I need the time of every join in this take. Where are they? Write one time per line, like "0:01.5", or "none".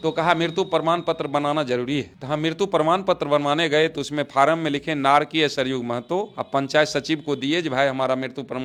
none